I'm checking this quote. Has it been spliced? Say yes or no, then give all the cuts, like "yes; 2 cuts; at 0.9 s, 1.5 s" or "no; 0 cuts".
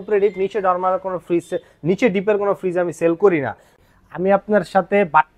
yes; 1 cut; at 3.8 s